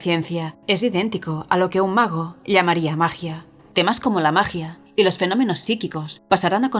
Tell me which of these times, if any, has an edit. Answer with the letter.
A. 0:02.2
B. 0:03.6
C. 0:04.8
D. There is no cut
B